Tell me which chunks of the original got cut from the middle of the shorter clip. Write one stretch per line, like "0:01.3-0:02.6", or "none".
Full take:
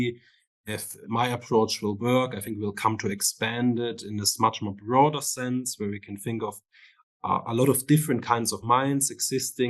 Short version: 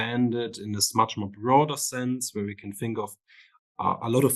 none